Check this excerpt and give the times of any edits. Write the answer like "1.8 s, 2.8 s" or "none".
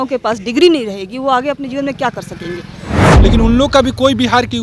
3.0 s